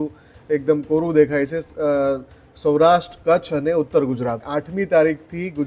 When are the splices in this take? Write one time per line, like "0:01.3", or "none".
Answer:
0:04.6